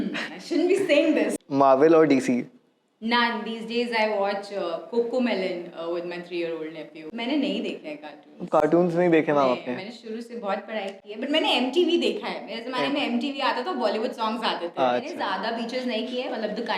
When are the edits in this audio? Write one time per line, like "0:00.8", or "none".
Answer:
0:01.3
0:07.1
0:15.3